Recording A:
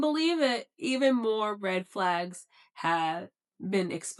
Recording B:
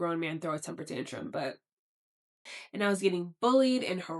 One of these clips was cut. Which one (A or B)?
B